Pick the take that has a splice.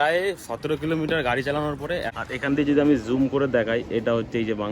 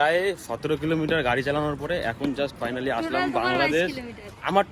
first; 1 cut; at 2.1 s

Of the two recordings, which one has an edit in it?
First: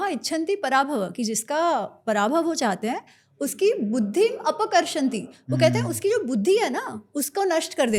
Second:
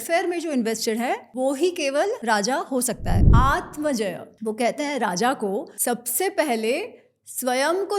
second; 5 cuts; at 1.3 s, 2.2 s, 3.3 s, 4.3 s, 5.7 s

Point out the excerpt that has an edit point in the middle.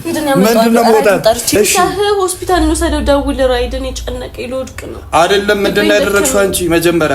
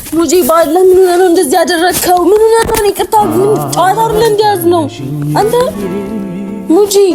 first; 1 cut; at 1.6 s

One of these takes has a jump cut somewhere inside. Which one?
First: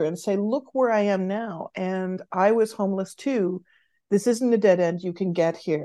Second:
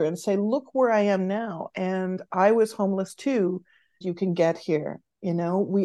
second; 1 cut; at 4.0 s

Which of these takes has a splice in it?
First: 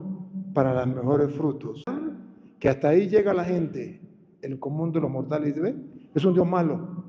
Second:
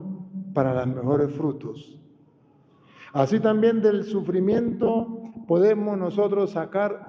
first; 1 cut; at 1.9 s

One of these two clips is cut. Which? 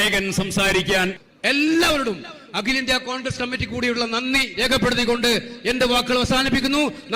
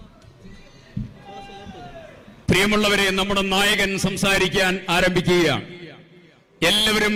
first; 1 cut; at 1.2 s

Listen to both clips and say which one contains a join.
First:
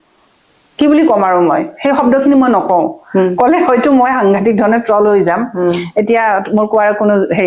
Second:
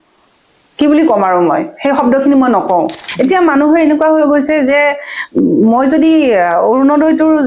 second; 1 cut; at 3.0 s

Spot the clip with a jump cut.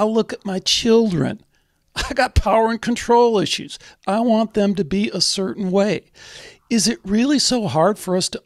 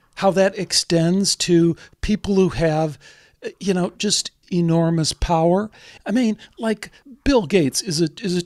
second; 3 cuts; at 4.4 s, 5.9 s, 7.0 s

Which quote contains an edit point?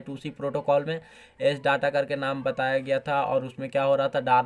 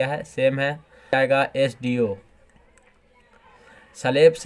second; 1 cut; at 1.1 s

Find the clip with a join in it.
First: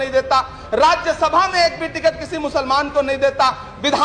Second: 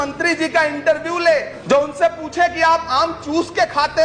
second; 1 cut; at 1.5 s

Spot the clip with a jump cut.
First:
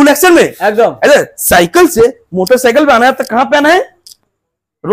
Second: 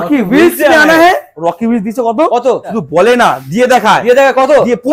second; 2 cuts; at 1.3 s, 2.7 s

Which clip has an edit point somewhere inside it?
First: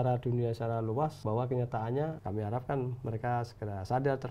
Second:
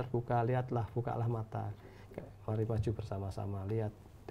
first; 2 cuts; at 1.2 s, 2.2 s

